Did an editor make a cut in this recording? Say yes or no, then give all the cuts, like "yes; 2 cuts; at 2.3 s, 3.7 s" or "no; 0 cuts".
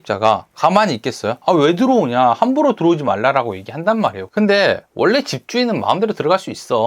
yes; 2 cuts; at 1.4 s, 4.2 s